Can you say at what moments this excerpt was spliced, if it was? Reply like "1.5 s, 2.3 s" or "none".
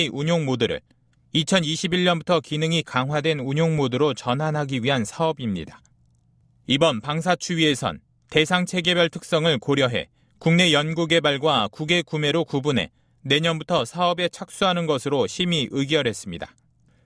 none